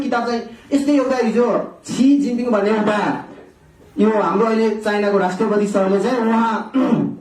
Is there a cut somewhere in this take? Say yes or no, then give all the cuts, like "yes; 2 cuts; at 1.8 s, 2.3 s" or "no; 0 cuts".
no; 0 cuts